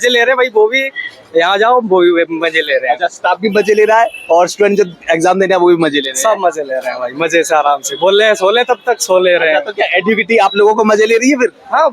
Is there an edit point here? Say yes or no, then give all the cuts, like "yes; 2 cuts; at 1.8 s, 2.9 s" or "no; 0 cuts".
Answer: no; 0 cuts